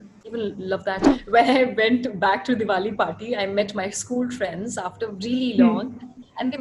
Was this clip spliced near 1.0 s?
yes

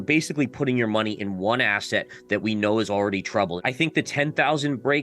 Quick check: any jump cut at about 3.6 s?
yes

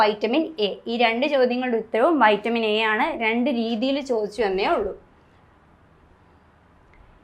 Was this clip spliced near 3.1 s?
no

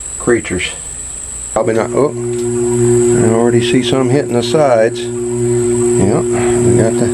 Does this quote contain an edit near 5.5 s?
no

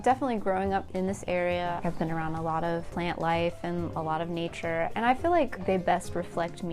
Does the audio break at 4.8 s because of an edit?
no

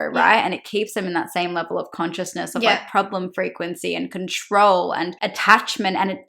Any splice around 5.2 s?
yes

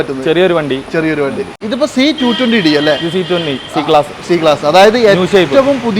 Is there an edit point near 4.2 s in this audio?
no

